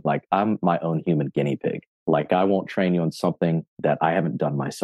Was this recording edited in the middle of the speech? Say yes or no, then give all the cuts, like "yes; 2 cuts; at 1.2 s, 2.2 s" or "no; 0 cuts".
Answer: yes; 1 cut; at 1.9 s